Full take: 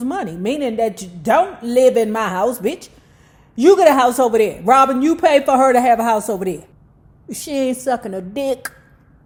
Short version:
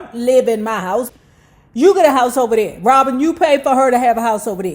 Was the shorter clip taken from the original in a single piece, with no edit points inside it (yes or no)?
no